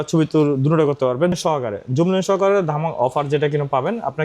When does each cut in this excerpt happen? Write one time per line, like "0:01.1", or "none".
0:01.4